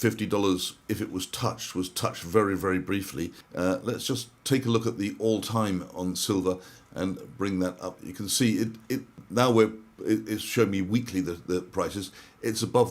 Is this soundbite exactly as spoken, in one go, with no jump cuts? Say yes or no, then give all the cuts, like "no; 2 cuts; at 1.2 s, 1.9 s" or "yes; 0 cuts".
no; 2 cuts; at 3.4 s, 9.2 s